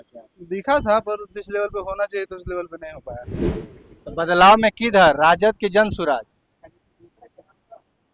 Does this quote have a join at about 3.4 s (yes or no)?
yes